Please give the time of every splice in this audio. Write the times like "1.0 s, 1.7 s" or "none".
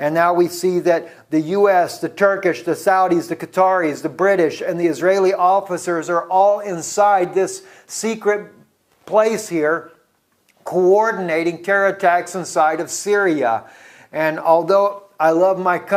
none